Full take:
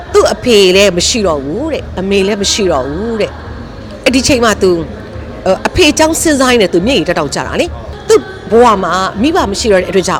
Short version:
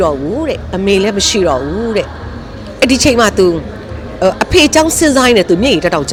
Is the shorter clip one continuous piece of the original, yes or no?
yes